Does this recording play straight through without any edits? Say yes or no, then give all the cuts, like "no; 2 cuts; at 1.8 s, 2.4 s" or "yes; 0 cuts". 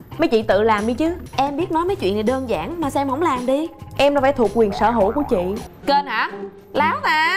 no; 2 cuts; at 1.2 s, 5.6 s